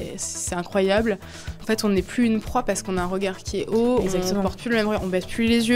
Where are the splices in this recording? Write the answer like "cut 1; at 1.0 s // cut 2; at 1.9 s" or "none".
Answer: cut 1; at 1.5 s